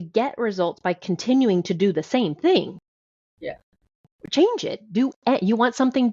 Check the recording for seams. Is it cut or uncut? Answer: uncut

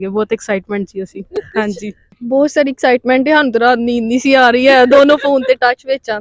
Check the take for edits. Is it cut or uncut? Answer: cut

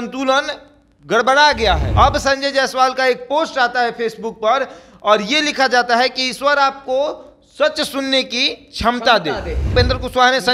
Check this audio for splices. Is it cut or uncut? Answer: cut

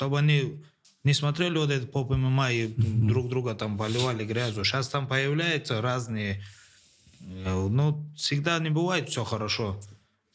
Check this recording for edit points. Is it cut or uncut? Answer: uncut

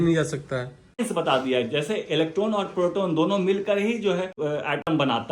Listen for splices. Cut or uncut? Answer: cut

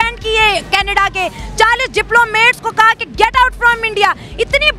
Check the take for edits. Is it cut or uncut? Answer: uncut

